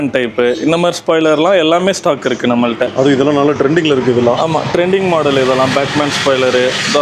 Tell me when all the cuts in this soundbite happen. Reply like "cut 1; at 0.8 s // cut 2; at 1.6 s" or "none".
none